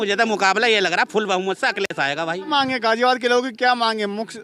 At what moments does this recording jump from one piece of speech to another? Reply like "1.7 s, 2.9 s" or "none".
2.5 s